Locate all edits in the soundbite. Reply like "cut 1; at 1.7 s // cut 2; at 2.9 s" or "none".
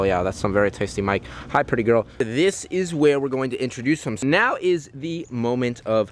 cut 1; at 2.2 s // cut 2; at 4.2 s